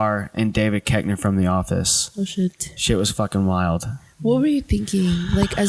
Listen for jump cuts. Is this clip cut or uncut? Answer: uncut